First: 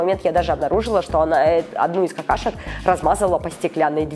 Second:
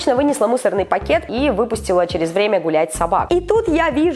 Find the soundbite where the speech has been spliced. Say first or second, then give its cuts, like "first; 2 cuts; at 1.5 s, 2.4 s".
second; 2 cuts; at 1.2 s, 3.2 s